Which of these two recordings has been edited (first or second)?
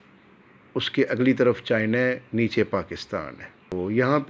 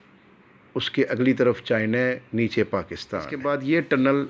second